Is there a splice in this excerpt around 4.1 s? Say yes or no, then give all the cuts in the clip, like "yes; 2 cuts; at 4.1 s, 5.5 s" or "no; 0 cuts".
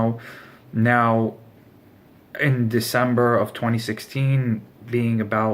no; 1 cut; at 2.1 s